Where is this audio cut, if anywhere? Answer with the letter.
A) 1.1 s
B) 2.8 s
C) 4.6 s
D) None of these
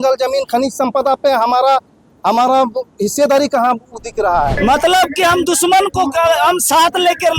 C